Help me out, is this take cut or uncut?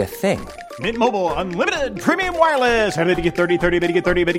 uncut